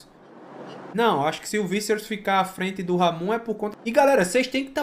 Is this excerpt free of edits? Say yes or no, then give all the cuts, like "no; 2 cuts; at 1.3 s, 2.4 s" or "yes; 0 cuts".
no; 1 cut; at 3.7 s